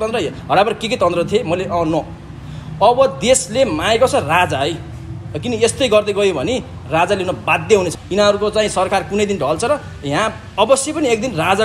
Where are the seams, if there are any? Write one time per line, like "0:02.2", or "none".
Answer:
0:08.0